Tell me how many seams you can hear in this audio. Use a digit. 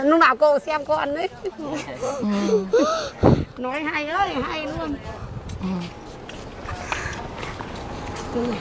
0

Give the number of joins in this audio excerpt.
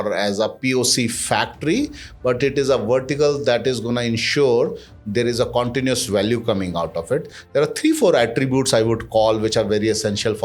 0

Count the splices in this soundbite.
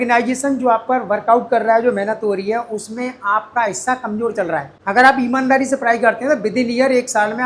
1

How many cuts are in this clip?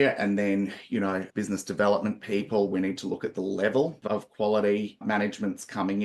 1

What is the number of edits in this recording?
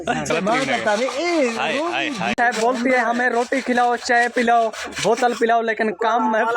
1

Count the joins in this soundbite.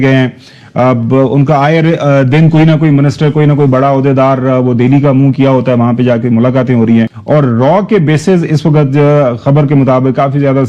1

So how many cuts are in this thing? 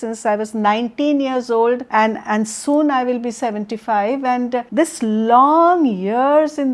2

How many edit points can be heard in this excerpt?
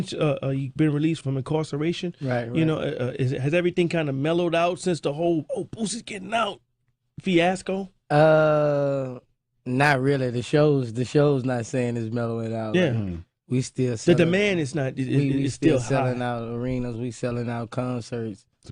1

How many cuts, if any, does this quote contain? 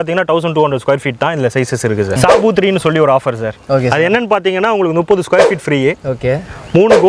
1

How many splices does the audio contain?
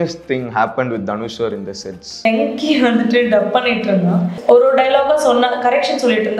2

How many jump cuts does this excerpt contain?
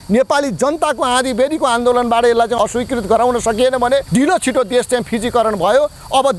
2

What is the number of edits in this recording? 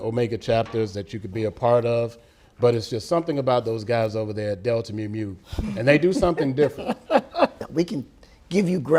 1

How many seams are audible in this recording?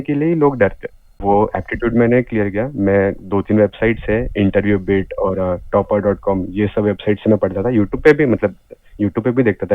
1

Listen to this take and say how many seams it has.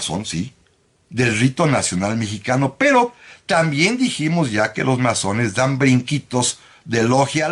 0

